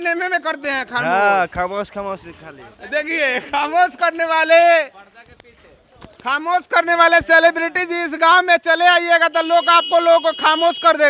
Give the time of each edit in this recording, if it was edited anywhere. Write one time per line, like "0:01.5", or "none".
none